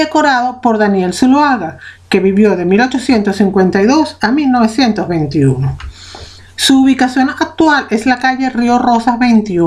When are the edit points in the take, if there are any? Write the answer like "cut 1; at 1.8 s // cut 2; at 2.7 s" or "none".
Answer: cut 1; at 5.2 s